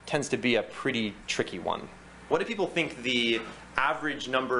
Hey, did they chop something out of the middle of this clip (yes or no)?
yes